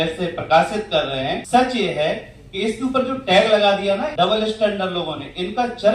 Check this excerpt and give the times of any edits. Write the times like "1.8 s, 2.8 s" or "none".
1.4 s, 4.1 s